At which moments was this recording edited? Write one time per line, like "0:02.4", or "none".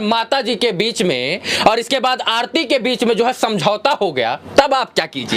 none